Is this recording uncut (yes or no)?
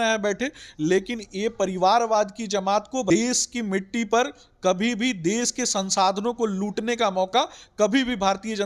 no